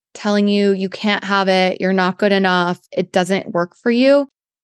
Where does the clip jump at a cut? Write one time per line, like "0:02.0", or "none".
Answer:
none